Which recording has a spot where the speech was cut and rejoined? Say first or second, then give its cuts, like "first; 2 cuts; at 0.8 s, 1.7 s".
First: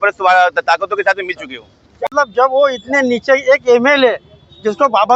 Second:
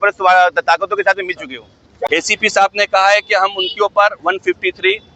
second; 1 cut; at 2.0 s